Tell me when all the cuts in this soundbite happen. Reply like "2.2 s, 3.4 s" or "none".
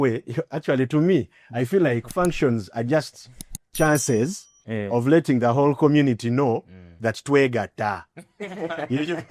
none